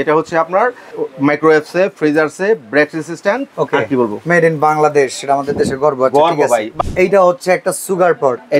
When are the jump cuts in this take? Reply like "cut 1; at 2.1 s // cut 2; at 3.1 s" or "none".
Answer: cut 1; at 0.9 s // cut 2; at 3.5 s // cut 3; at 6.7 s